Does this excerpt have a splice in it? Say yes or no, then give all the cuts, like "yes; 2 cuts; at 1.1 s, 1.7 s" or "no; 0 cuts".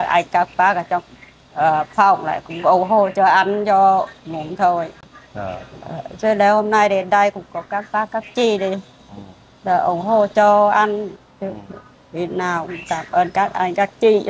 no; 0 cuts